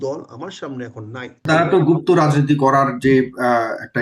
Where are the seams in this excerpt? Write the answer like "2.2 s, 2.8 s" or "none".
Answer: 1.5 s